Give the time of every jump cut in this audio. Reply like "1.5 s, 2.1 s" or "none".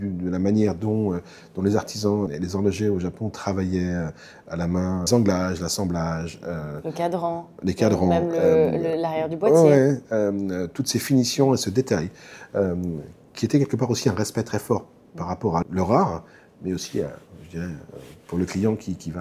2.3 s, 5.1 s, 15.6 s